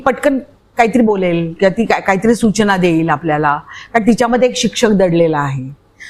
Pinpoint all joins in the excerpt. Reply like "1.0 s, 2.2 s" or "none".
none